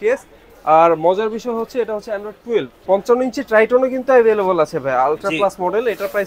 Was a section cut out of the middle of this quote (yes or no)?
yes